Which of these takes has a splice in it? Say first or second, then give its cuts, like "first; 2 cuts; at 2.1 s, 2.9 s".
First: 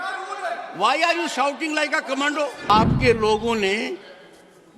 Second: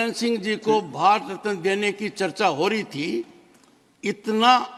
first; 1 cut; at 2.7 s